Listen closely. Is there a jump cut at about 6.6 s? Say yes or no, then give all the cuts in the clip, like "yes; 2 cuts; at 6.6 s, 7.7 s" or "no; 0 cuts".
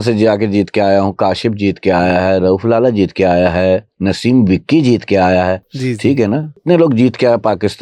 yes; 2 cuts; at 5.7 s, 6.6 s